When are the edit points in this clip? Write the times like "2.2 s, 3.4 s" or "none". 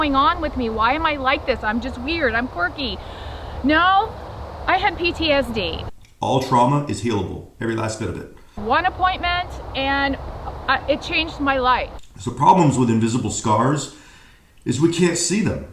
5.8 s, 8.5 s, 12.0 s